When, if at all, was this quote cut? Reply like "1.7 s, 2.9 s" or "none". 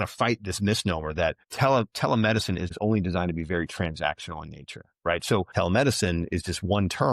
1.4 s, 2.7 s, 5.5 s